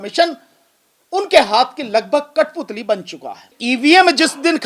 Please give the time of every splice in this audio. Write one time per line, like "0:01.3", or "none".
0:03.5